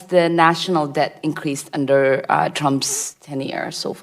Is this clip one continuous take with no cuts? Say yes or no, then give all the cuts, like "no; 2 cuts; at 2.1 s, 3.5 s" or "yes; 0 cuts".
yes; 0 cuts